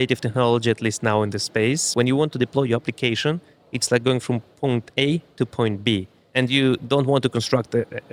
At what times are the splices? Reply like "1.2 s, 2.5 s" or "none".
1.9 s, 6.2 s